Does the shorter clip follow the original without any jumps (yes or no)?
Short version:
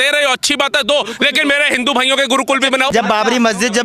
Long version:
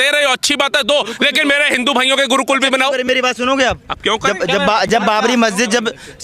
no